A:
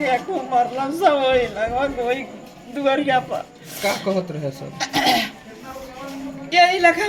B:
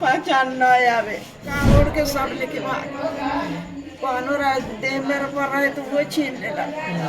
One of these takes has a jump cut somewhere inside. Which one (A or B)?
B